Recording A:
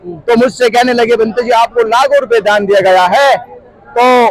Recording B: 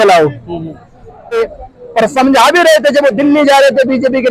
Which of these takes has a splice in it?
B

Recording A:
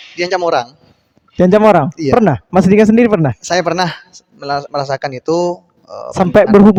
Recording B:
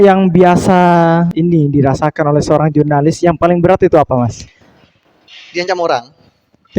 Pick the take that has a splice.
B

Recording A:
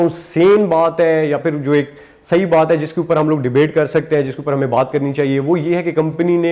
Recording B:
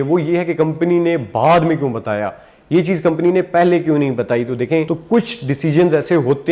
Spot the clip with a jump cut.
B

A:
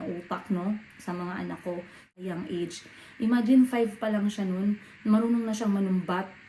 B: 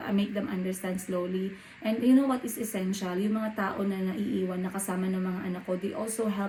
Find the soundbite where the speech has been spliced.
A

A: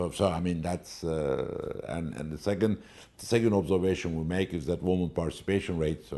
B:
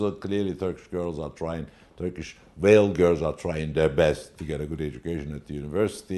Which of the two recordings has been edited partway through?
B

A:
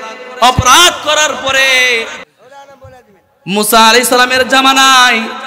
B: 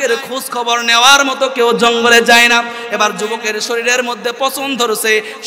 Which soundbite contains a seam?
A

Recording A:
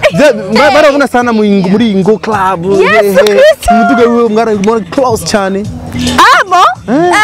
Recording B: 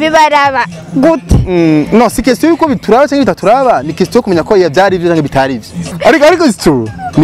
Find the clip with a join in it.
B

